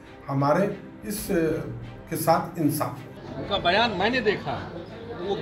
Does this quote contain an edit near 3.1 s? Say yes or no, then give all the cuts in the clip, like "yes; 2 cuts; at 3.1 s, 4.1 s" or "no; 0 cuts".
yes; 1 cut; at 3.1 s